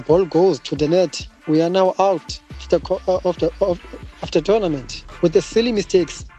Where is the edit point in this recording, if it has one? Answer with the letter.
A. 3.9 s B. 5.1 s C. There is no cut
C